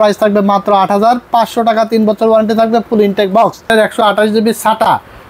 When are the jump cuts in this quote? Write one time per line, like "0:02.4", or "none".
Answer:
0:03.7